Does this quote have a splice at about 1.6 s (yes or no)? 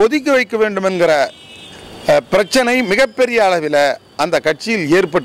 no